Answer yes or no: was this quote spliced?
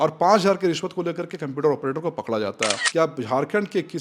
yes